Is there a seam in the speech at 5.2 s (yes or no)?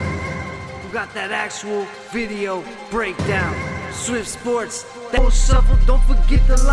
yes